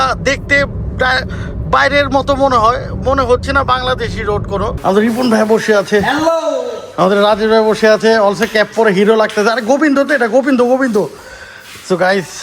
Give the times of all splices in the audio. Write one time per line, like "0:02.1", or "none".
0:04.7
0:11.0